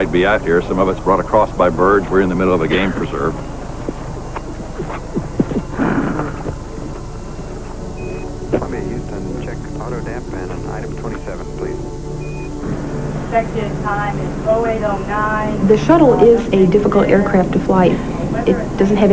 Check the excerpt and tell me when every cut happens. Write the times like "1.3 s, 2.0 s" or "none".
none

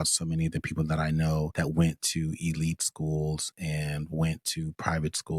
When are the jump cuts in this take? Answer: 1.5 s

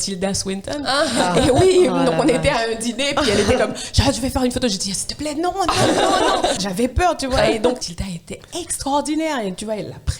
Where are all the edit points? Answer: 6.6 s, 8.0 s

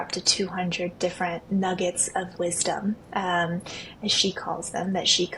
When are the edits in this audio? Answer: none

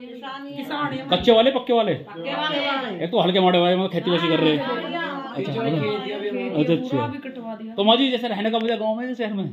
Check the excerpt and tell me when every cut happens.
none

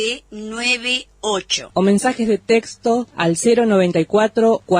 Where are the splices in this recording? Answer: 1.6 s

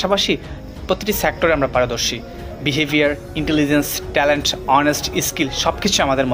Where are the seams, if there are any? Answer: none

